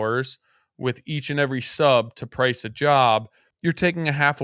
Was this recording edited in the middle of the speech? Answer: yes; 1 cut; at 3.4 s

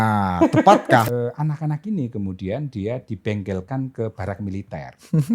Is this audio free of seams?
no; 1 cut; at 1.1 s

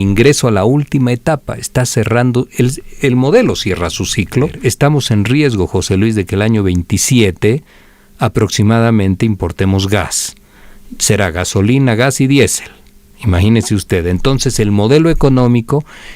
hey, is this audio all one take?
no; 1 cut; at 4.5 s

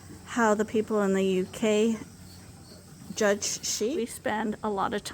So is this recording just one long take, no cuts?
no; 1 cut; at 4.0 s

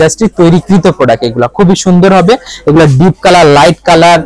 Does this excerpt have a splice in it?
no; 0 cuts

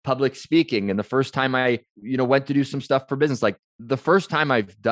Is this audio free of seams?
no; 2 cuts; at 2.0 s, 3.7 s

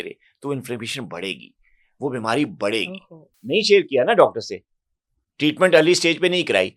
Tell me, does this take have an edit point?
yes; 1 cut; at 3.4 s

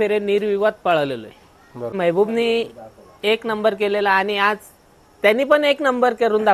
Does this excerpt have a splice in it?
yes; 1 cut; at 1.9 s

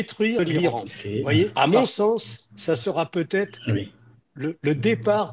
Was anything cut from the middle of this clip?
yes; 1 cut; at 1.5 s

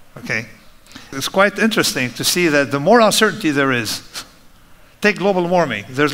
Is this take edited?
yes; 1 cut; at 1.1 s

